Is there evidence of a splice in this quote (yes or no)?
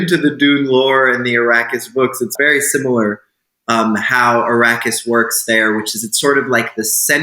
yes